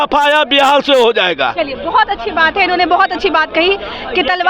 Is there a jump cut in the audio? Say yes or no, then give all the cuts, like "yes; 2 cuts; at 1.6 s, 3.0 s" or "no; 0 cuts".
no; 0 cuts